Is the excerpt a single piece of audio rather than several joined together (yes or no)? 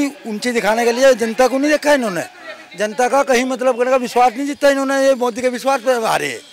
yes